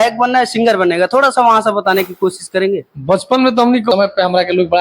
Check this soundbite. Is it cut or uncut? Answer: cut